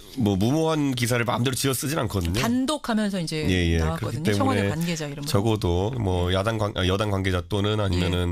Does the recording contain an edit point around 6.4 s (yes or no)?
yes